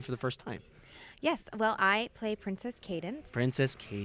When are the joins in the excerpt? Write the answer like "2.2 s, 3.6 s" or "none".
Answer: 3.1 s

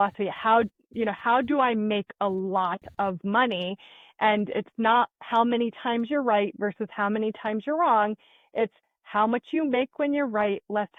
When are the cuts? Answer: none

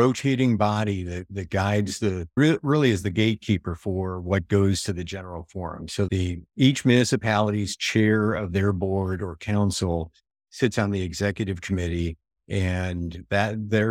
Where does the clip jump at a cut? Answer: none

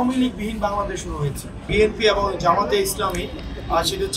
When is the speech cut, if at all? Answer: 1.7 s

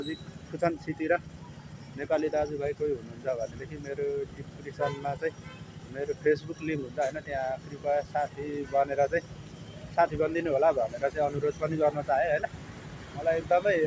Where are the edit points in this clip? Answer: none

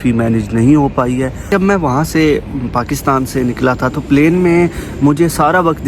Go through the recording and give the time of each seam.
1.5 s

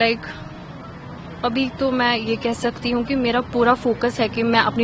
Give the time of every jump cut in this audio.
none

